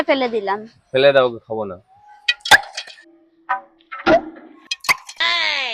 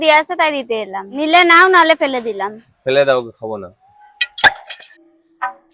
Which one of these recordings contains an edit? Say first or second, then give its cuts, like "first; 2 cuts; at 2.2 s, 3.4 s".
second; 1 cut; at 1.0 s